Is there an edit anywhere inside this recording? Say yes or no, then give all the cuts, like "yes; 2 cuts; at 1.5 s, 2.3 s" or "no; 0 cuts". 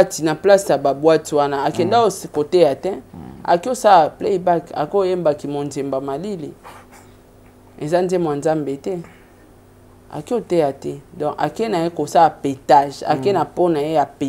no; 0 cuts